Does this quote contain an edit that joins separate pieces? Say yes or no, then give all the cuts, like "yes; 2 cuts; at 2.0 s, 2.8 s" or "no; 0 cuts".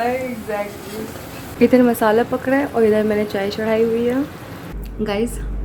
no; 0 cuts